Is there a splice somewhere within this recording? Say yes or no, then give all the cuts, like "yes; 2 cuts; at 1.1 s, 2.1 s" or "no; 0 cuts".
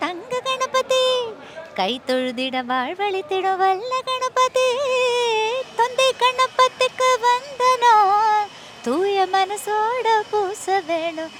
no; 0 cuts